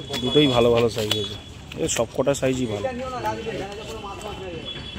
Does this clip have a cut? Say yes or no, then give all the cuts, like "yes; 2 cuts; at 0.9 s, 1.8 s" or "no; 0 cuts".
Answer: no; 0 cuts